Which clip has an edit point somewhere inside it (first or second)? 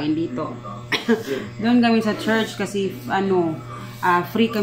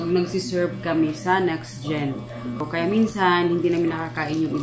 second